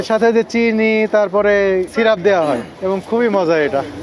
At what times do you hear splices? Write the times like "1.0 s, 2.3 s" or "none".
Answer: 1.9 s, 2.7 s